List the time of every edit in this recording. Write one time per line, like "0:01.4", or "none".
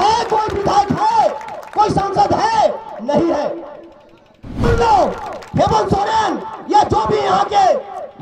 0:04.6